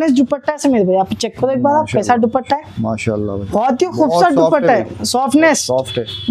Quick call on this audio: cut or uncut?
uncut